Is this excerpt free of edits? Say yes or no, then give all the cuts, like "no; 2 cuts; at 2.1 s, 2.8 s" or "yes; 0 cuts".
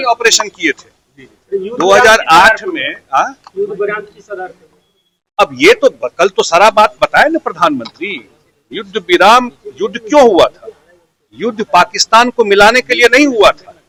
yes; 0 cuts